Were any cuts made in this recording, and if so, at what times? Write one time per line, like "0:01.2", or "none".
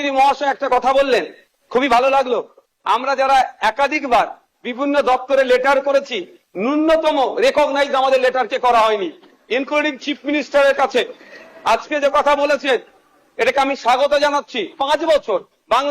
0:14.7